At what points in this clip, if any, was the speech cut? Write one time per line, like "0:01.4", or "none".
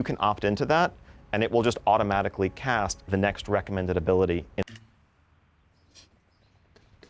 none